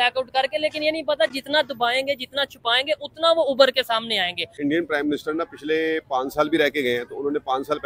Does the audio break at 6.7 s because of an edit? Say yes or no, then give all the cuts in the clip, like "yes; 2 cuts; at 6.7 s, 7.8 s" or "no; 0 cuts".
no; 1 cut; at 4.4 s